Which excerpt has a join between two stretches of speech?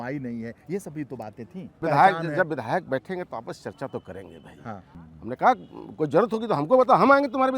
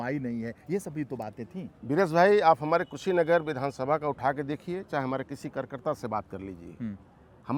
first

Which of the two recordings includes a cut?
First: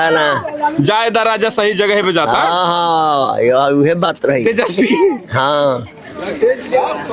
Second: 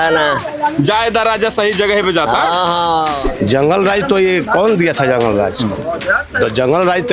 second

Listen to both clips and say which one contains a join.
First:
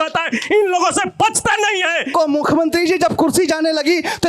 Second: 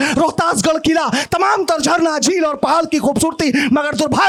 first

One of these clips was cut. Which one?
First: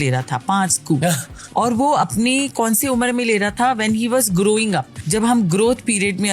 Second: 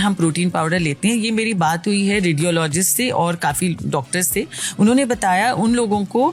first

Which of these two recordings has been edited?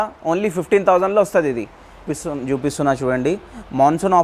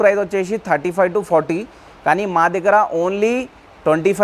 first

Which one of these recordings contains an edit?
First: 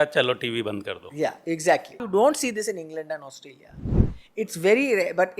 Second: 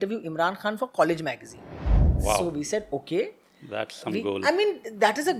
first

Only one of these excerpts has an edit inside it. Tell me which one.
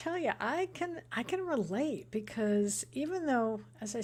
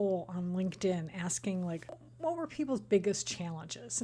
second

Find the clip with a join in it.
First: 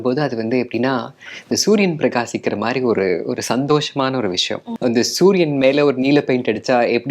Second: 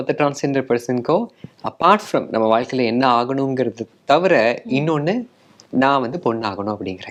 first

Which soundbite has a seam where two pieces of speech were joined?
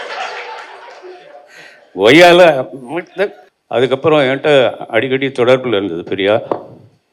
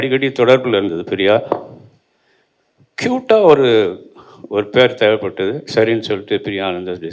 first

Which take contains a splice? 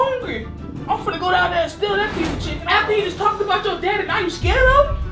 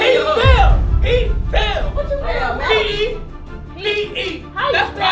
first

